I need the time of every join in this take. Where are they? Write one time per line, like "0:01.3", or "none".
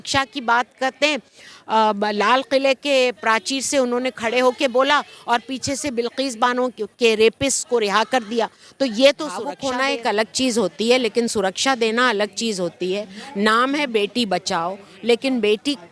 0:02.4
0:09.6